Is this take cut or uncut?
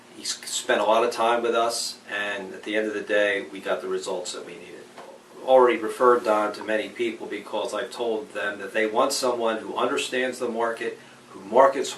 cut